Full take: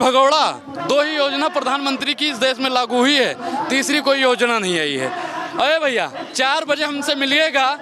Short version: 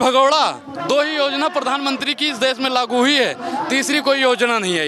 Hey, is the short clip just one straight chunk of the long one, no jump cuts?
yes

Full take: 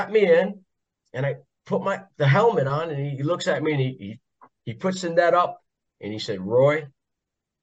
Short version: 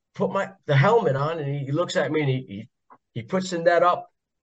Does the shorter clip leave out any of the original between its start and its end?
no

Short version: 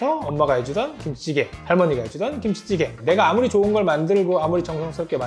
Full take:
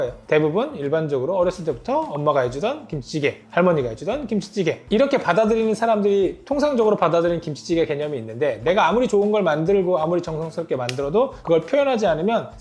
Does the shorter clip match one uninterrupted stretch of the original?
no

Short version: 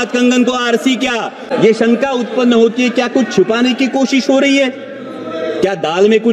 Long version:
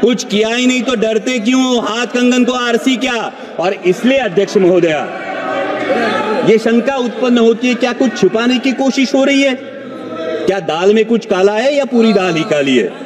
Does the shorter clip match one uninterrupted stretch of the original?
no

